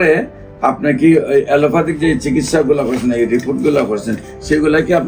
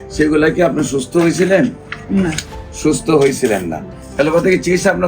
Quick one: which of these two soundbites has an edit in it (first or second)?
second